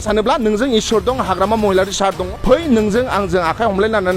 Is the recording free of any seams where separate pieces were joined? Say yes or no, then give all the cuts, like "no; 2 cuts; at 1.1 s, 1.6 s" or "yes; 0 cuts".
no; 1 cut; at 2.2 s